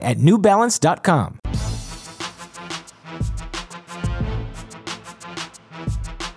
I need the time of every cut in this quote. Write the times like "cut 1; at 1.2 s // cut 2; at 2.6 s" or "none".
cut 1; at 1.4 s // cut 2; at 4.7 s